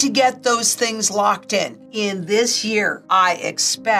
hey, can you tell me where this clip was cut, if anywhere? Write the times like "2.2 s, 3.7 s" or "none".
1.8 s